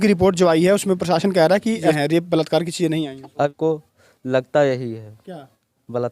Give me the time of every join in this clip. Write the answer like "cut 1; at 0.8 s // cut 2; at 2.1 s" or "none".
cut 1; at 1.9 s // cut 2; at 3.5 s